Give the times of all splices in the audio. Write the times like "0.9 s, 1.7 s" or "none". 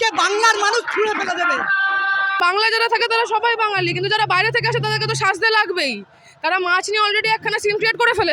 2.4 s